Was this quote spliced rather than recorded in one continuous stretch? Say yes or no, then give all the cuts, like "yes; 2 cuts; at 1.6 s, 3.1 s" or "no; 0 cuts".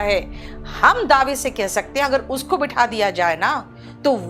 no; 0 cuts